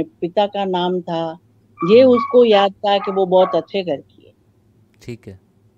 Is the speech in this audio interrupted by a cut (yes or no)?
no